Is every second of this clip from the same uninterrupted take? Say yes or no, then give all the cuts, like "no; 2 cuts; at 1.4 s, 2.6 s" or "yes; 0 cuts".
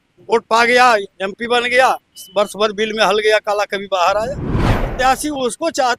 no; 1 cut; at 4.9 s